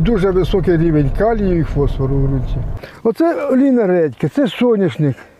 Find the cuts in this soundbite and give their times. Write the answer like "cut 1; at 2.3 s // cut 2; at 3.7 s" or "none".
cut 1; at 2.8 s